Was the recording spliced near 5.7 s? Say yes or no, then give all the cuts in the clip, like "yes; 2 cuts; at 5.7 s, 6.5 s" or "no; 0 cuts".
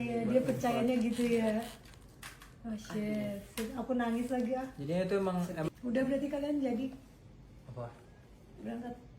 yes; 1 cut; at 5.7 s